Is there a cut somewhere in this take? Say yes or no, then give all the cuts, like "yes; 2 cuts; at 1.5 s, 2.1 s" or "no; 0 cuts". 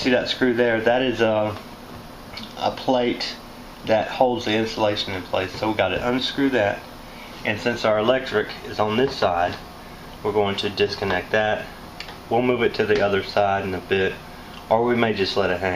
yes; 1 cut; at 8.2 s